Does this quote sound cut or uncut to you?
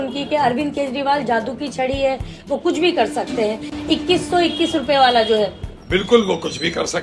uncut